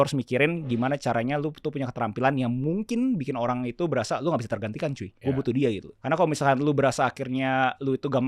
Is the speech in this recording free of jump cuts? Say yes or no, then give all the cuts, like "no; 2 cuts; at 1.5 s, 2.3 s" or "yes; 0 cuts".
no; 1 cut; at 5.4 s